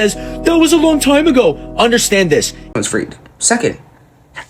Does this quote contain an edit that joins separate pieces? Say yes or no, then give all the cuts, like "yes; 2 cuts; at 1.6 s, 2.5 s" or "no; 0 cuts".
yes; 1 cut; at 2.7 s